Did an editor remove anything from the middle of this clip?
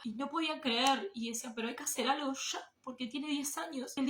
no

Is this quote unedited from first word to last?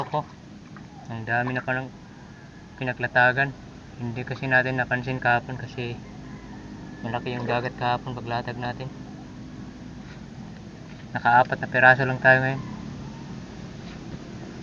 yes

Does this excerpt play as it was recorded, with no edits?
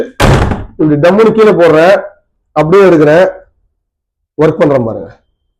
yes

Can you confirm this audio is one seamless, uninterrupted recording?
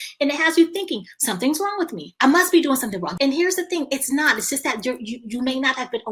no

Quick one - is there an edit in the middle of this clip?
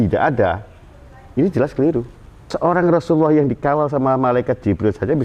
yes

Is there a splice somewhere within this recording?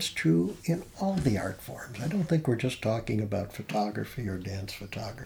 no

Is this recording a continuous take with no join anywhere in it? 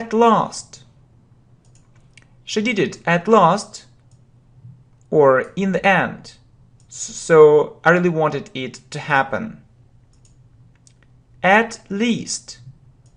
yes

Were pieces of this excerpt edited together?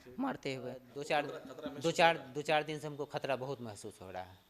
yes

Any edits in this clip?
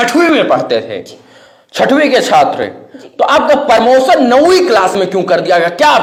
no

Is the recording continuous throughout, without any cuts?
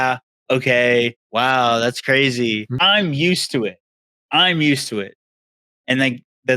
no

